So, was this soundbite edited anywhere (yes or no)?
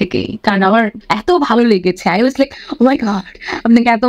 yes